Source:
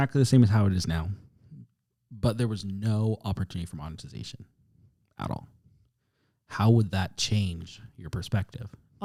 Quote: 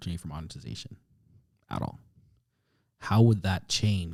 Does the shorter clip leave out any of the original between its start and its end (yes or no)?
no